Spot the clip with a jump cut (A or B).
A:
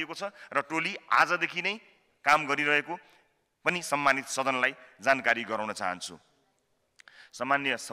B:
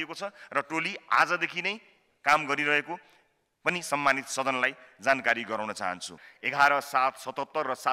B